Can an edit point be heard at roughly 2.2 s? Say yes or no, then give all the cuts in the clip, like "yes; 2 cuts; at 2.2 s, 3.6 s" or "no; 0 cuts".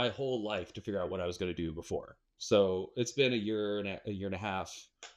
yes; 1 cut; at 2.2 s